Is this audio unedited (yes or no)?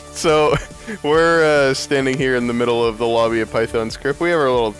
yes